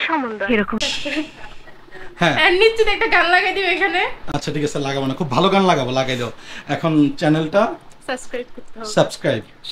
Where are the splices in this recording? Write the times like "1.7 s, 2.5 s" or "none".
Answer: none